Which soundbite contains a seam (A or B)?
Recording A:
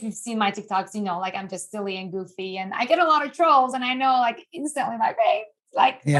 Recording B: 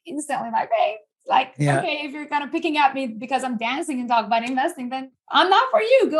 B